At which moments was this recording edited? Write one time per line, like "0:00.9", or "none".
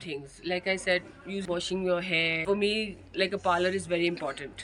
0:01.4
0:02.4

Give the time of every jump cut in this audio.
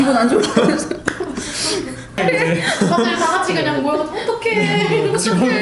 0:02.2

